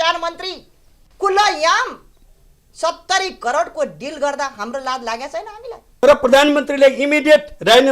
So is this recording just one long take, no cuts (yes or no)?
no